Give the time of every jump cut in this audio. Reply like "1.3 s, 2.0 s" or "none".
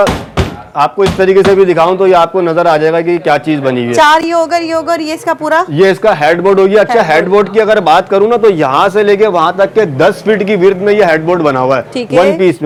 none